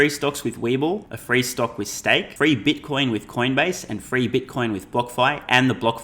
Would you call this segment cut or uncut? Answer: cut